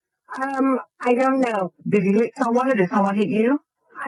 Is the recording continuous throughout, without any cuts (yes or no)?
yes